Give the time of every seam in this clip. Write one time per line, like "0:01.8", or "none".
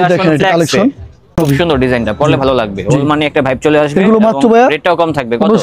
0:01.2